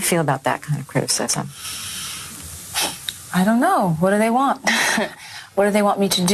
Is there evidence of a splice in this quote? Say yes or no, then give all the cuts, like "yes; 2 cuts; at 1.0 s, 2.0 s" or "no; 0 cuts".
no; 0 cuts